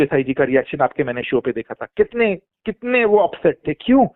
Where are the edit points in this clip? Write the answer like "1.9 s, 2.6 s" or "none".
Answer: none